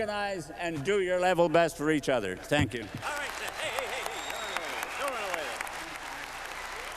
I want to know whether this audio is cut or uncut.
cut